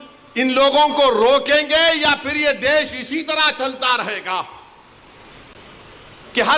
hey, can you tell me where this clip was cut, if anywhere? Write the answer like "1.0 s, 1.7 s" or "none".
none